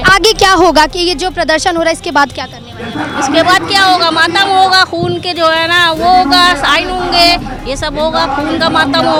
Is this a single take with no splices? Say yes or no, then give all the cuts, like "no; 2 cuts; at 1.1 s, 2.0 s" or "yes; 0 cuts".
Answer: yes; 0 cuts